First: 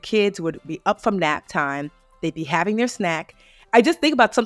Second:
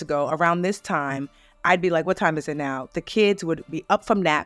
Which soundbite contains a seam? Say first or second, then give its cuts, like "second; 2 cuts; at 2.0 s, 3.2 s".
first; 1 cut; at 3.5 s